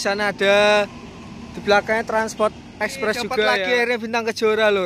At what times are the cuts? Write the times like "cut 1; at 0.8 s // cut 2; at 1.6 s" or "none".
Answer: cut 1; at 3.6 s